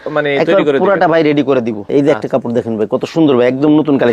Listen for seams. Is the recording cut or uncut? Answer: cut